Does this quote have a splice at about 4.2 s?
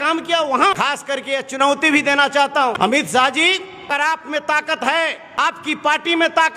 yes; 4 cuts; at 1.0 s, 2.6 s, 4.2 s, 5.6 s

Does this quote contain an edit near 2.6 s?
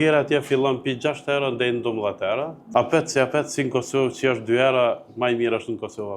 yes; 1 cut; at 2.6 s

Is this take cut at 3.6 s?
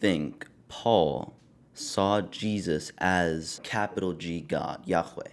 yes; 1 cut; at 3.6 s

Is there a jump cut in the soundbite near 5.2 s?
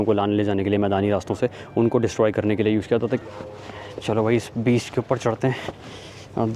no; 1 cut; at 3.2 s

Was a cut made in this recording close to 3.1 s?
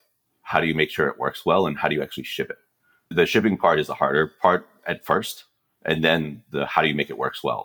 yes; 1 cut; at 3.1 s

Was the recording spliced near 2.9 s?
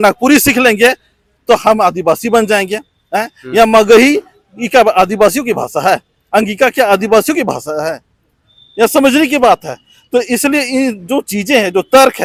no; 0 cuts

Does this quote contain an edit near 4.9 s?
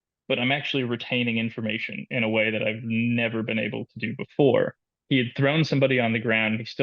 yes; 1 cut; at 4.9 s

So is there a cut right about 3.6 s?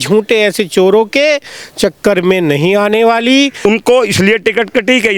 yes; 1 cut; at 3.6 s

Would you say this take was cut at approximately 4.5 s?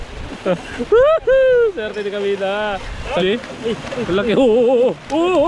no; 1 cut; at 3.2 s

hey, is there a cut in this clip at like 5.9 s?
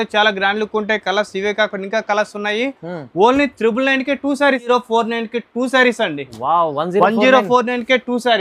no; 1 cut; at 4.7 s

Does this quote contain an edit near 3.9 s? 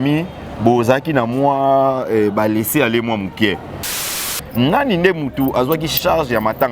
yes; 1 cut; at 3.9 s

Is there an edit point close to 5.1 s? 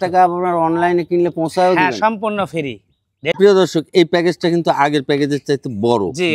no; 1 cut; at 3.3 s

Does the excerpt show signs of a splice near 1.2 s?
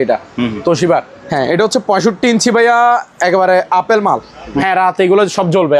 yes; 2 cuts; at 1.2 s, 4.6 s

